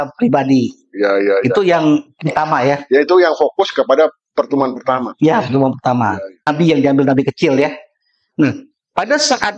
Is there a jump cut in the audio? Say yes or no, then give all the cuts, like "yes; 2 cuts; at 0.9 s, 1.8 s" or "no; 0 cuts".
yes; 1 cut; at 6.5 s